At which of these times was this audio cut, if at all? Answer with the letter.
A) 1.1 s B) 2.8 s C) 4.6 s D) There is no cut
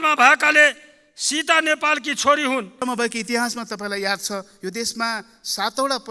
B